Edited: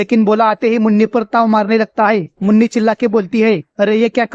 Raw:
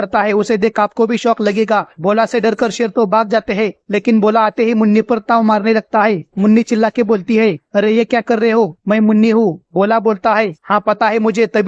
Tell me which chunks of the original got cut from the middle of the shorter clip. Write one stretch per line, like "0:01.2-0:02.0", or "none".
none